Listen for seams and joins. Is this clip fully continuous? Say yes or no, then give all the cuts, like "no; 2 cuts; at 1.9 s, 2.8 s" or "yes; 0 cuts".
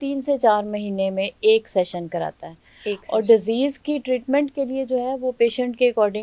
yes; 0 cuts